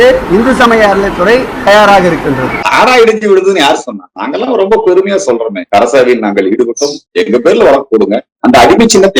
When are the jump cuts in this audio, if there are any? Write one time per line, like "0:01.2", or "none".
0:02.6
0:08.3